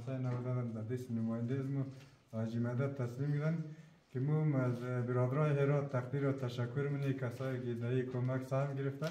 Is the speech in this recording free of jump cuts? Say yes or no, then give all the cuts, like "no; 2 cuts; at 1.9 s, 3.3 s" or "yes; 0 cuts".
yes; 0 cuts